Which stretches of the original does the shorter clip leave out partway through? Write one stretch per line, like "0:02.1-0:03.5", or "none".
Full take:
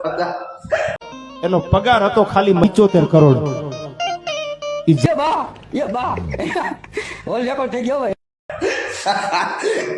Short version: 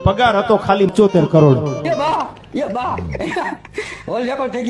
0:02.6-0:02.7
0:03.7-0:05.1

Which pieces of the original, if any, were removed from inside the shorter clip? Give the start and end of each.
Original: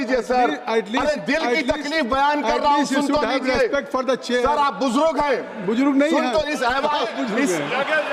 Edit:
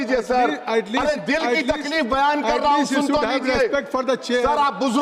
none

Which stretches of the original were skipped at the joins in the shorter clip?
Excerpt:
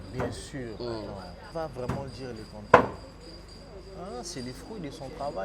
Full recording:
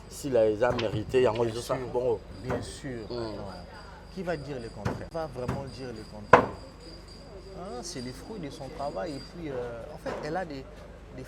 0:03.8-0:05.0

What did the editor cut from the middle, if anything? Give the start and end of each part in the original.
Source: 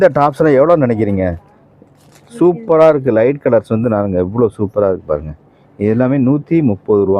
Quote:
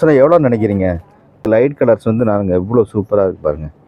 0:02.1-0:03.4

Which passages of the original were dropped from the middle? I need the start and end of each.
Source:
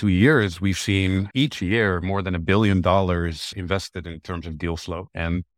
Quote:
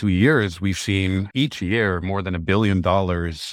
none

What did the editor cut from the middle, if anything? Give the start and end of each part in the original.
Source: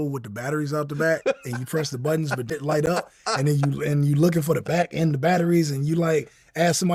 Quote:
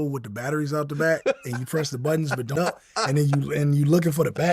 0:02.6-0:02.9

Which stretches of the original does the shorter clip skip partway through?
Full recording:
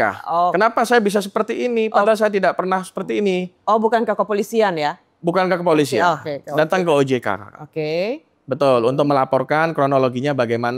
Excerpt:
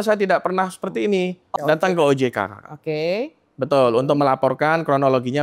0:03.6-0:06.3

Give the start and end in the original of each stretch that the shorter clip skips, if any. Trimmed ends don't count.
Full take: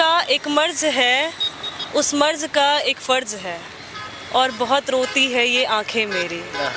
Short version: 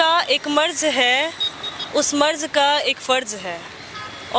none

